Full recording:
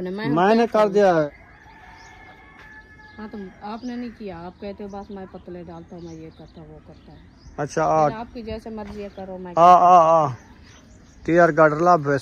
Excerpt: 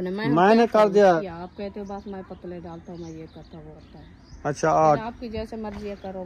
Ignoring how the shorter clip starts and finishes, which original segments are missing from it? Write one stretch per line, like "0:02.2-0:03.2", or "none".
0:01.2-0:04.2
0:06.8-0:06.9